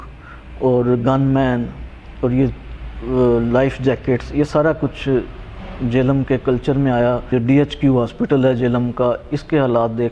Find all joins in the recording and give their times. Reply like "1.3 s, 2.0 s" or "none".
7.3 s